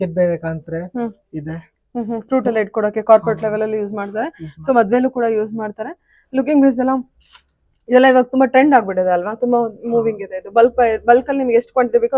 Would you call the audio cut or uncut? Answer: uncut